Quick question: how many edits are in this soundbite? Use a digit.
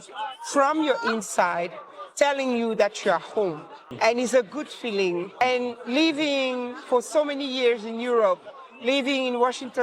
2